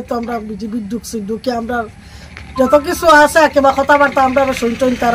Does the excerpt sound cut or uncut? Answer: uncut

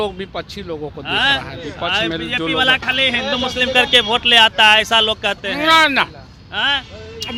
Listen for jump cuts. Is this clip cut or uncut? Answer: uncut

